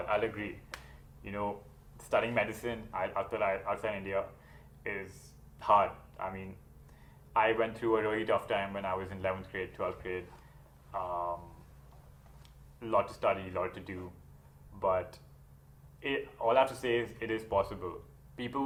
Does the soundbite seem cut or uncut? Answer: uncut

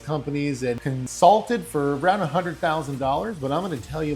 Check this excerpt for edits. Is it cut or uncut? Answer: cut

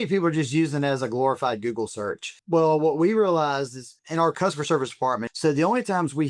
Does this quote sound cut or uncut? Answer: cut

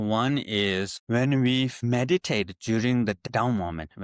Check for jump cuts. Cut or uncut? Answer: cut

